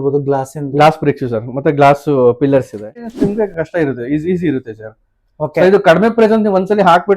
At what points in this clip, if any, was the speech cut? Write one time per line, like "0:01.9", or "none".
0:03.1